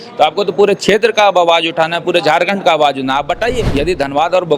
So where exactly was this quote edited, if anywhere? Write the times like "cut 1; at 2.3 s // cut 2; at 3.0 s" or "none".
cut 1; at 3.7 s